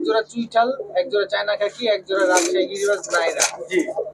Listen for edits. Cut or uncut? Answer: uncut